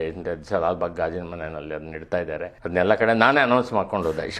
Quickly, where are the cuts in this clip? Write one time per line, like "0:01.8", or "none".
0:02.5

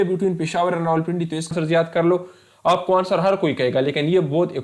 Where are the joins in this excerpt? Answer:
0:01.5

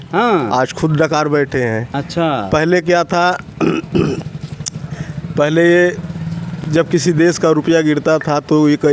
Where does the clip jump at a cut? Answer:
none

